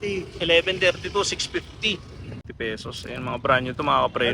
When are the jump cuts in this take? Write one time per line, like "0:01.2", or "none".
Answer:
0:02.4